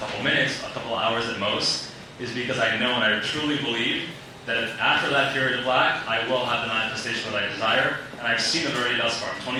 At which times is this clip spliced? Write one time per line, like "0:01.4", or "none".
none